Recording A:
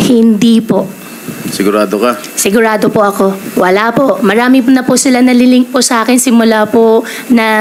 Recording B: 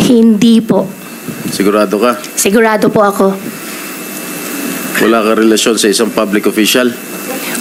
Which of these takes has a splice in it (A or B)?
A